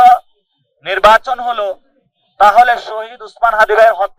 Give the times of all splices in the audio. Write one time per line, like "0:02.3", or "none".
none